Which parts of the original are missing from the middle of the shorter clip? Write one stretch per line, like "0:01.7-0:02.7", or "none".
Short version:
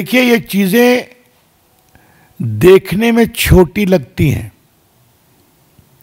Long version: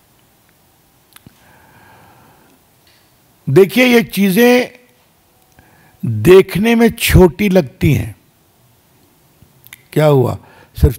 none